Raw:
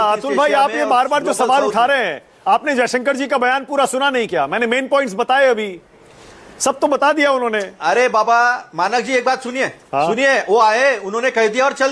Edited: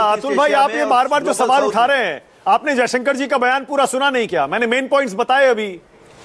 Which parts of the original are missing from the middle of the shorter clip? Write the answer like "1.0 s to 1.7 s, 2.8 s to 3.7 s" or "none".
none